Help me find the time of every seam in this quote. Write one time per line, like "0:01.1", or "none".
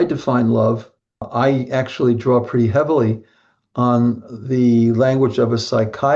0:01.3